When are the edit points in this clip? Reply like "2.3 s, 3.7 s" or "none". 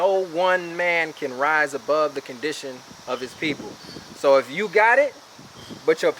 none